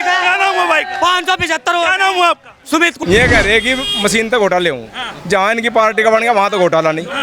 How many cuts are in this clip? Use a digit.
1